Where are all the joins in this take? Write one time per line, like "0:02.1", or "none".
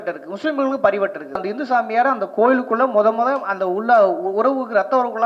0:01.5